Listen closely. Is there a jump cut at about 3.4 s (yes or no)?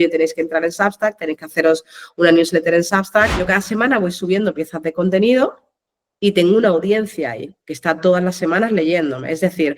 yes